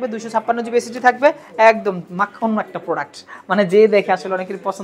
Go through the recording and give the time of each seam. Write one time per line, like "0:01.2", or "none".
none